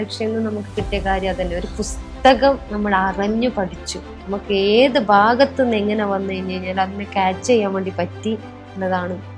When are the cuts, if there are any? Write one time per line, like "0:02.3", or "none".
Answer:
0:04.2